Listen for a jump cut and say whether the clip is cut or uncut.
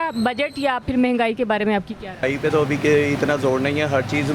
cut